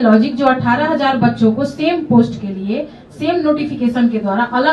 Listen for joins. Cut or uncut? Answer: uncut